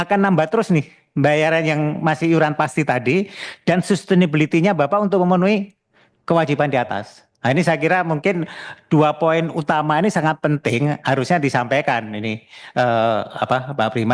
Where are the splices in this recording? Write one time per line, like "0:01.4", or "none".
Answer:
none